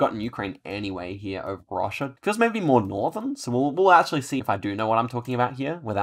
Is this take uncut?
no; 2 cuts; at 2.2 s, 4.4 s

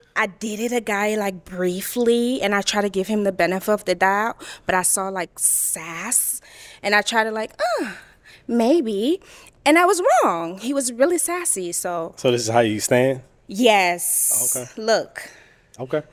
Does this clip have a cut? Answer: no; 0 cuts

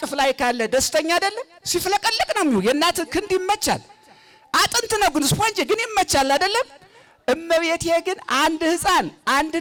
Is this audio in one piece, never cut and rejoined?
yes; 0 cuts

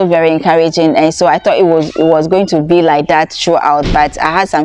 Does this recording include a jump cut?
no; 0 cuts

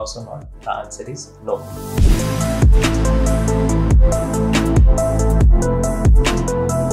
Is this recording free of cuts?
no; 1 cut; at 1.7 s

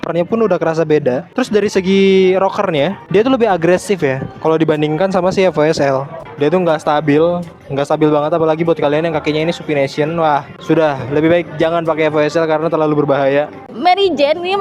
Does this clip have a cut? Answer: yes; 3 cuts; at 1.3 s, 6.1 s, 13.6 s

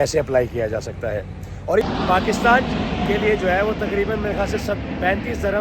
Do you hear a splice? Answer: yes; 1 cut; at 1.8 s

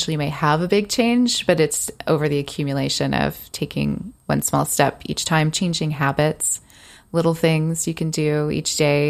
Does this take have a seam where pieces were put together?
no; 0 cuts

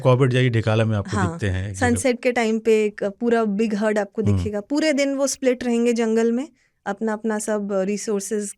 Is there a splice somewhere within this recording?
no; 0 cuts

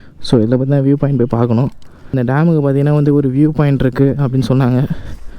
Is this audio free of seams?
no; 1 cut; at 2.1 s

